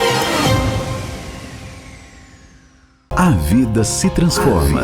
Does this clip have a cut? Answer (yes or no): yes